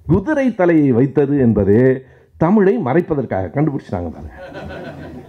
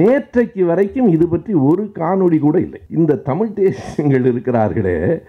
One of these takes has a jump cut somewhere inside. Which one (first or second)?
second